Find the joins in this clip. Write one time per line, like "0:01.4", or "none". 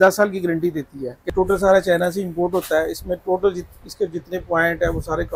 0:01.2